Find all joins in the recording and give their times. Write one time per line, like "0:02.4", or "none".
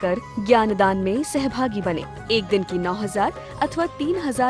none